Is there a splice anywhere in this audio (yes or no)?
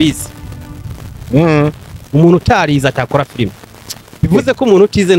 no